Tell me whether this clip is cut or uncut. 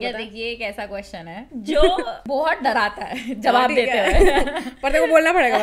cut